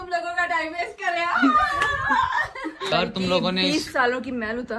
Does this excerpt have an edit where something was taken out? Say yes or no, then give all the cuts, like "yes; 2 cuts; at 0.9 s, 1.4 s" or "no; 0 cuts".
yes; 1 cut; at 2.9 s